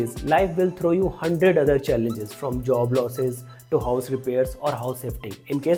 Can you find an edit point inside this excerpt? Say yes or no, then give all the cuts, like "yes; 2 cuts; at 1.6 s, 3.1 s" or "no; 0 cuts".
no; 0 cuts